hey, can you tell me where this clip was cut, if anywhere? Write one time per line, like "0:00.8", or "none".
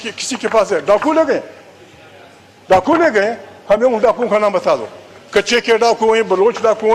none

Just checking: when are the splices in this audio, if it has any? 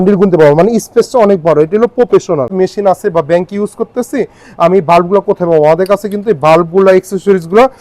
0:02.5

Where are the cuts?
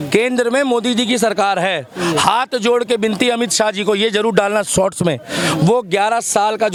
none

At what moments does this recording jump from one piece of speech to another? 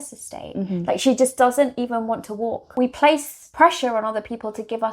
0:02.6
0:03.4

